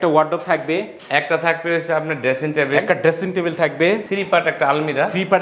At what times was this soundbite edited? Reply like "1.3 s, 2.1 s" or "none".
1.0 s, 4.1 s